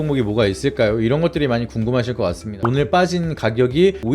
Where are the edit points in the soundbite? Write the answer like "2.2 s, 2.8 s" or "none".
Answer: 2.6 s